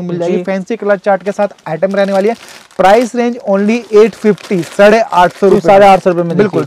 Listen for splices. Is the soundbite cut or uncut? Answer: uncut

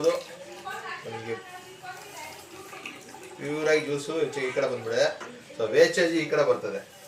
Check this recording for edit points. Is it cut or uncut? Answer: uncut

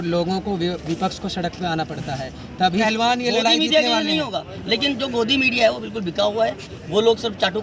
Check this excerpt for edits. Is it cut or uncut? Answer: cut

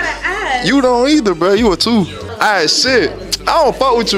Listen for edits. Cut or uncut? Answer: cut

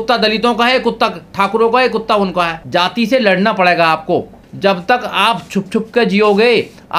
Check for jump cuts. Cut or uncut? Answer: cut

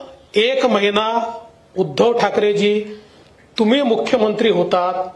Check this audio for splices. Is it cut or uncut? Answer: uncut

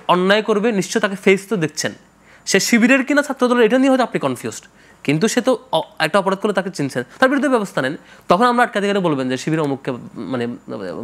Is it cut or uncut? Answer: uncut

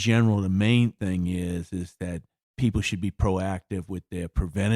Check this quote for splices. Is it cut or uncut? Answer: cut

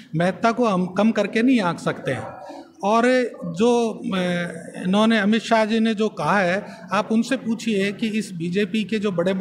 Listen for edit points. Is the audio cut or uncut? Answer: uncut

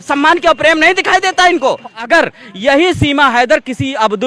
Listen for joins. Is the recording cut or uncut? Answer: cut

